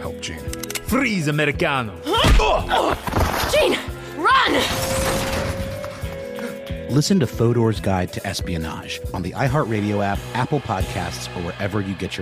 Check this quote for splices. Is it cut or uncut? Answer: uncut